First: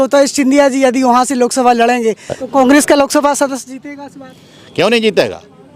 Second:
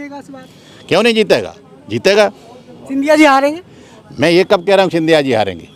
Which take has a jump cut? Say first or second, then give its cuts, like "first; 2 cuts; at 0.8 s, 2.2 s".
first; 1 cut; at 2.3 s